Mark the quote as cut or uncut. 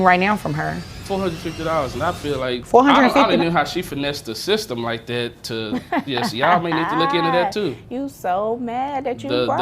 cut